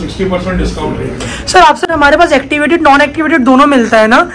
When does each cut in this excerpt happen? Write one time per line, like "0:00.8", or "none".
0:01.8

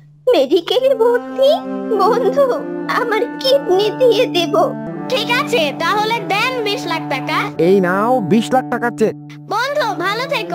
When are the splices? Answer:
0:04.8

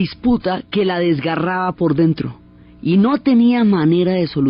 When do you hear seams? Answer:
none

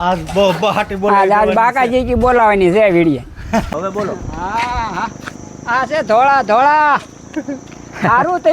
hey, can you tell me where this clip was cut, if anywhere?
0:03.7

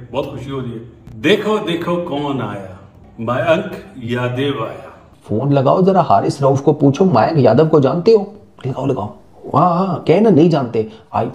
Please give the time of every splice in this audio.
0:05.1

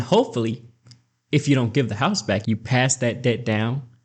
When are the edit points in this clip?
0:02.4

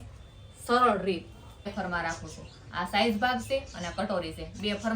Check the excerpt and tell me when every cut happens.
0:01.7

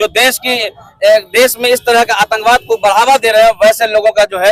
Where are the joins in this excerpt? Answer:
none

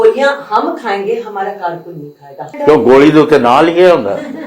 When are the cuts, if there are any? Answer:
0:02.5

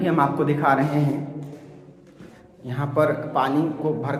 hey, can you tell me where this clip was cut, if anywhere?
none

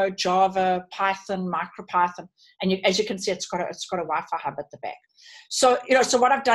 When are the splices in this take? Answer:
none

